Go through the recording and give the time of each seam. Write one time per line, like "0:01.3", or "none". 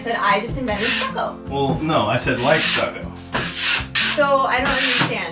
0:04.0